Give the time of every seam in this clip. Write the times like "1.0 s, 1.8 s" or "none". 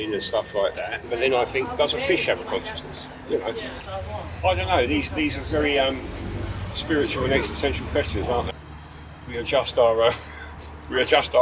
1.0 s, 3.7 s, 8.5 s